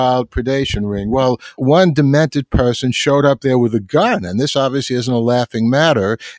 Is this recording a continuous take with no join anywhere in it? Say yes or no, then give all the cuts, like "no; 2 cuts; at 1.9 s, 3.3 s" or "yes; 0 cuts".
no; 1 cut; at 1.5 s